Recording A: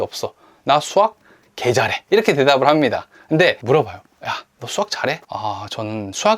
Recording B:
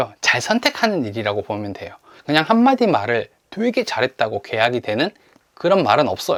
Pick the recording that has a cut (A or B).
A